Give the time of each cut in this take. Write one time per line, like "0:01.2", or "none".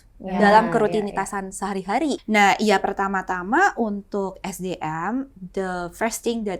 0:02.2